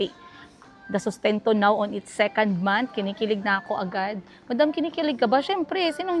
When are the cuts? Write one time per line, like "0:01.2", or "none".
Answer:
none